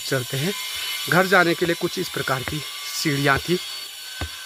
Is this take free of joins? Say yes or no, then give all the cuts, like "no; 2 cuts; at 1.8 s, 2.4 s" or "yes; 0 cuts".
yes; 0 cuts